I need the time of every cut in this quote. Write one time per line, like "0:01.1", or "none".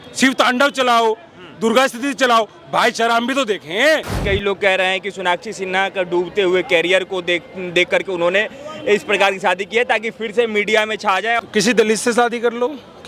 0:04.1
0:11.4